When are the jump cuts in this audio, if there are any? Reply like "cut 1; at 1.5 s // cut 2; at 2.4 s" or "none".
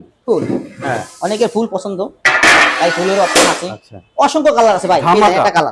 none